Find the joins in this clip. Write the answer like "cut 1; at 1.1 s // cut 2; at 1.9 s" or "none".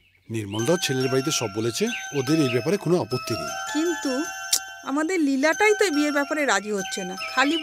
none